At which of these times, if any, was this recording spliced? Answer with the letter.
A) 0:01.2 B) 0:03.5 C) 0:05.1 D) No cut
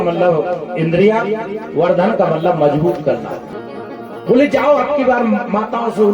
B